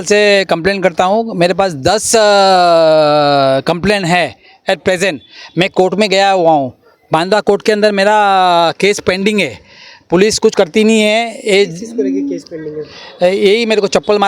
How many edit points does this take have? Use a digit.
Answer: 0